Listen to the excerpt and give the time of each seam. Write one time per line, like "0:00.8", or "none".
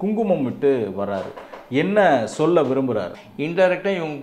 0:03.2